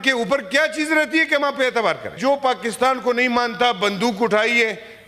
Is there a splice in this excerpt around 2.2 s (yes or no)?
yes